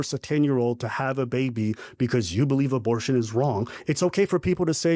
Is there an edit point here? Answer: no; 0 cuts

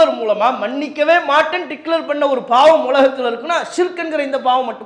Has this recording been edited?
no; 0 cuts

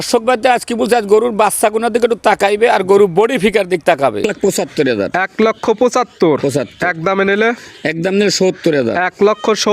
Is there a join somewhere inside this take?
yes; 1 cut; at 4.2 s

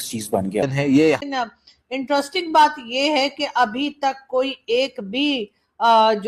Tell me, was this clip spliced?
yes; 1 cut; at 1.2 s

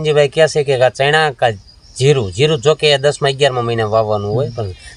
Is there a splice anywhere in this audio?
no; 0 cuts

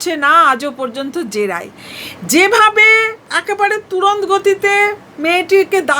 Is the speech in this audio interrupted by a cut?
no; 0 cuts

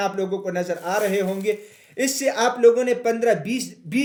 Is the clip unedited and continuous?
yes; 0 cuts

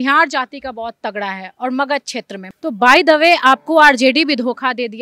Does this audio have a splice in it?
yes; 1 cut; at 2.4 s

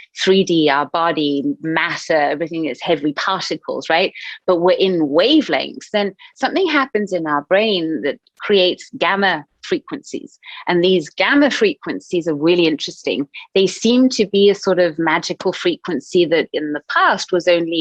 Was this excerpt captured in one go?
yes; 0 cuts

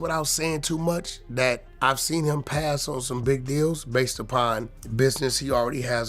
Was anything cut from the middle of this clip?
yes; 2 cuts; at 1.7 s, 4.8 s

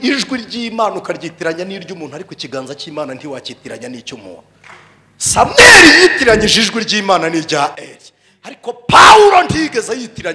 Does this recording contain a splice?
no; 0 cuts

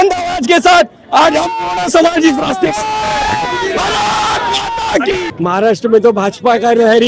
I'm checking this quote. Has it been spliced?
yes; 1 cut; at 5.3 s

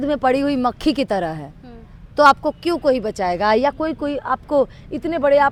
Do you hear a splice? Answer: no; 0 cuts

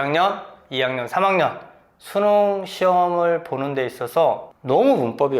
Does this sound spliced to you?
yes; 1 cut; at 4.5 s

